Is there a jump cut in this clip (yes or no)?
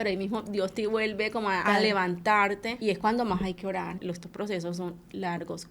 yes